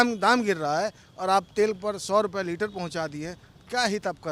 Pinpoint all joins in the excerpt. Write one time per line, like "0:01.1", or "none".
none